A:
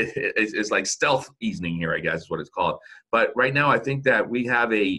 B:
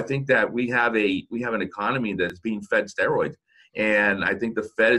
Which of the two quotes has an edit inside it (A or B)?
B